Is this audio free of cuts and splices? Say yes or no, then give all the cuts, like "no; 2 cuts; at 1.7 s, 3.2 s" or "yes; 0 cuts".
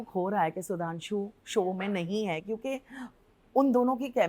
yes; 0 cuts